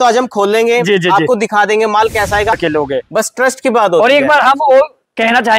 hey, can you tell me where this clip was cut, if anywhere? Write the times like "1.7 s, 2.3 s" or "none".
2.5 s